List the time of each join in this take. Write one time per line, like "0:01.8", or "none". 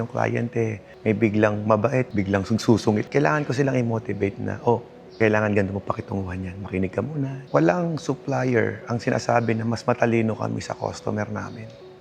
0:03.1
0:07.3